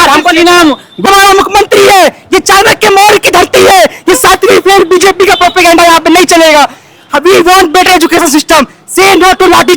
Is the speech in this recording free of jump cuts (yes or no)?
no